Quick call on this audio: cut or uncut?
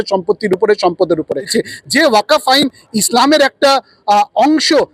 cut